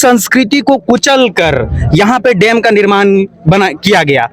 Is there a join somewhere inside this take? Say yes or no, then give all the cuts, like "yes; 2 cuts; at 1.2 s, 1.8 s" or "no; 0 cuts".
no; 0 cuts